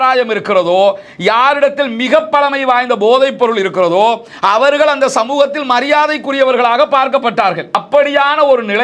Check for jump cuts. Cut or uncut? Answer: cut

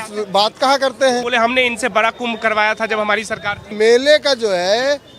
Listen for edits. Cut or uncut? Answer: cut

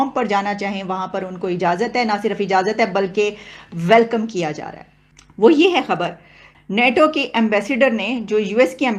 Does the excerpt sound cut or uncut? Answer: uncut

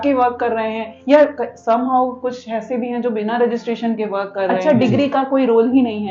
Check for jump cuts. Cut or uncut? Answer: cut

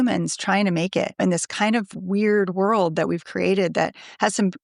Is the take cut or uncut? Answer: cut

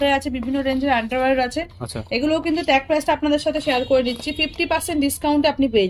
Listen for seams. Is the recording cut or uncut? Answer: uncut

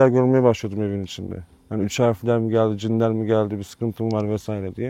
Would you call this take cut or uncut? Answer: uncut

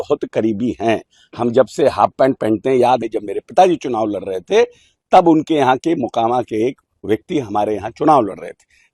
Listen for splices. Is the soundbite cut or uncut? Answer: cut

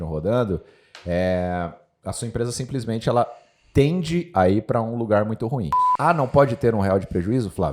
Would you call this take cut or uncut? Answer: cut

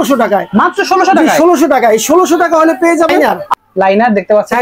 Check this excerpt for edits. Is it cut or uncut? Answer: cut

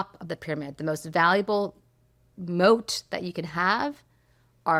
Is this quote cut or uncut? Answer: uncut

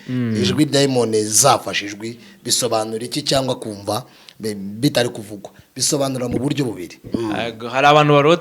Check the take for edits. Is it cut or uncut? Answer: cut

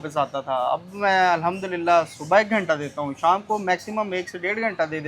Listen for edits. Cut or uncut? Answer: uncut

